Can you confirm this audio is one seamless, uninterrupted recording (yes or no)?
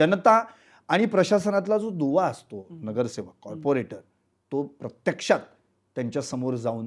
yes